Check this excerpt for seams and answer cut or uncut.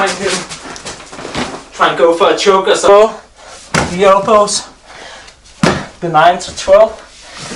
cut